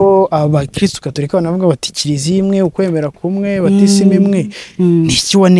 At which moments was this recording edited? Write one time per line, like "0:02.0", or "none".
none